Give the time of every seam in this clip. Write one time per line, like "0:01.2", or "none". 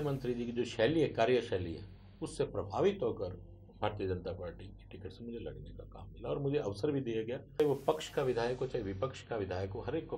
0:07.6